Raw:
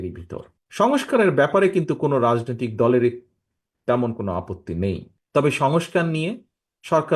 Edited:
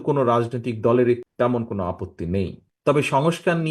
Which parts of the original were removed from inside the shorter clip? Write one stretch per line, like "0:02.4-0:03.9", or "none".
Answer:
0:03.2-0:03.8